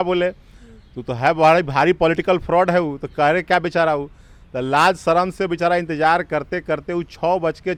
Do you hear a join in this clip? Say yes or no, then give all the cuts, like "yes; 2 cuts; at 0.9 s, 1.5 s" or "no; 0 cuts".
no; 0 cuts